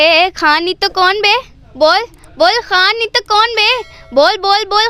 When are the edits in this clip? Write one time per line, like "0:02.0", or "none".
none